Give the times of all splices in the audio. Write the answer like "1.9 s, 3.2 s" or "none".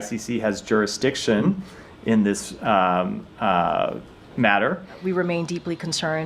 4.9 s